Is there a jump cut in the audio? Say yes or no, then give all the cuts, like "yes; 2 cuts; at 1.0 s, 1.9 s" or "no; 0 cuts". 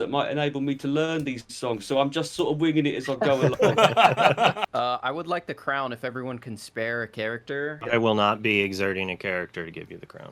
yes; 2 cuts; at 4.6 s, 7.8 s